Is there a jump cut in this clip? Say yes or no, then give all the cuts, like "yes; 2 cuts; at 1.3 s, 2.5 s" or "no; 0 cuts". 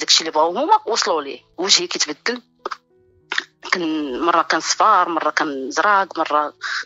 yes; 1 cut; at 1.5 s